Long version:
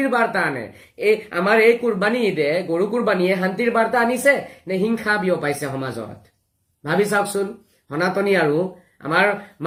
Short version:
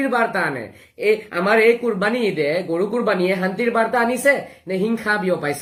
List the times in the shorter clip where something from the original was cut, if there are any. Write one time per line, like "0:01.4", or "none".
none